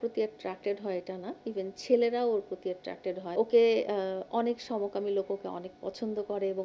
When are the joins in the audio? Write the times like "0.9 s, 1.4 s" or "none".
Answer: 3.2 s